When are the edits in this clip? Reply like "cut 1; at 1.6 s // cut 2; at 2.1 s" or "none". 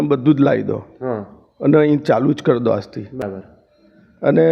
cut 1; at 3.2 s